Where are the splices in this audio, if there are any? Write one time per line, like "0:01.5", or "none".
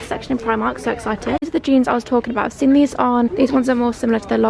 0:01.5
0:03.3